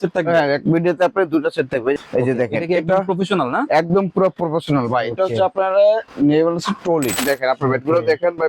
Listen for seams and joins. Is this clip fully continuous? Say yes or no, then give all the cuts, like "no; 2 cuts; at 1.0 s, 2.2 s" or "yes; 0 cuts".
no; 2 cuts; at 2.0 s, 7.2 s